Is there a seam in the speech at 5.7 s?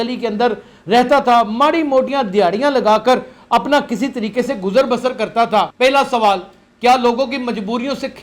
yes; 1 cut; at 5.7 s

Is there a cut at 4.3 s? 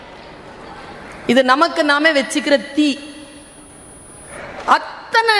yes; 1 cut; at 4.3 s

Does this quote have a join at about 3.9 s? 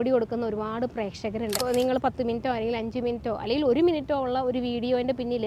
no; 1 cut; at 1.7 s

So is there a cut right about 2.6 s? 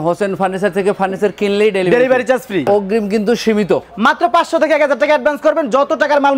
yes; 1 cut; at 2.6 s

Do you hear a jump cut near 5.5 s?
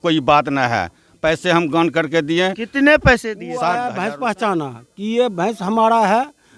no; 1 cut; at 3.7 s

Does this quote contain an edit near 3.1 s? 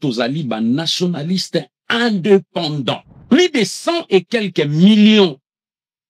yes; 1 cut; at 3.1 s

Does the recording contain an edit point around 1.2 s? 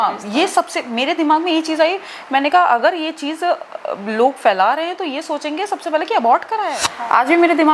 no; 1 cut; at 6.8 s

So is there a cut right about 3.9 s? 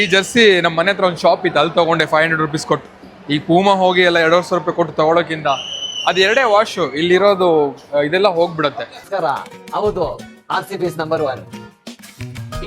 no; 1 cut; at 9.0 s

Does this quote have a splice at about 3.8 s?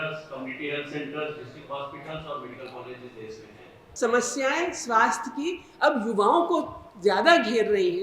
yes; 1 cut; at 3.8 s

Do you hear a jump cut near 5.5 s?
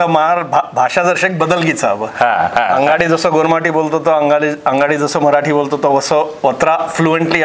no; 0 cuts

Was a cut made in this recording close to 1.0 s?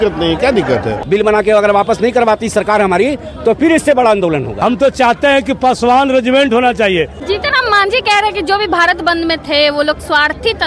yes; 3 cuts; at 1.0 s, 4.5 s, 7.2 s

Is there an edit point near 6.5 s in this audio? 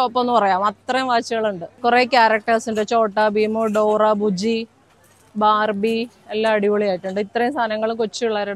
no; 1 cut; at 1.7 s

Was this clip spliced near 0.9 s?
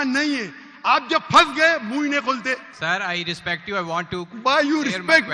no; 1 cut; at 2.7 s

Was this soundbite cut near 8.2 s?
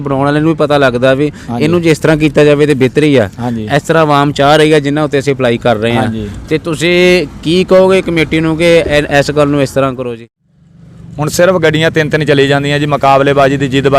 no; 1 cut; at 10.1 s

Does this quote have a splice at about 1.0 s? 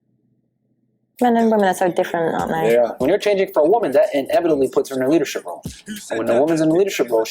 yes; 1 cut; at 1.0 s

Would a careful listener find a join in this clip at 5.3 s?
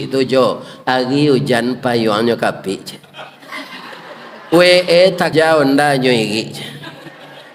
yes; 1 cut; at 5.3 s

